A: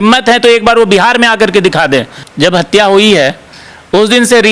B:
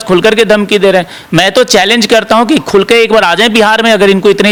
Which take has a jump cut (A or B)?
A